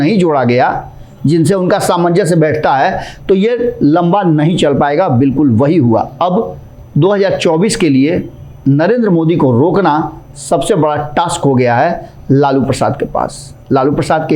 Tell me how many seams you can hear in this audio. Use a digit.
0